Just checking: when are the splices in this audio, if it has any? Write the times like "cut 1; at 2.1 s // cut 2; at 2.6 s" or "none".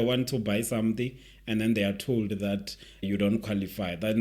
cut 1; at 3.0 s